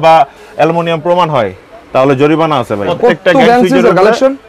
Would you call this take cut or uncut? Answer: cut